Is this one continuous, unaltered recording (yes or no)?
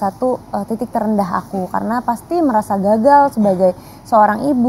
yes